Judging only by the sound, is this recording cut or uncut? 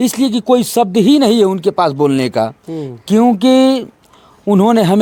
uncut